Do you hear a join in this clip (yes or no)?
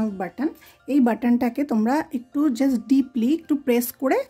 no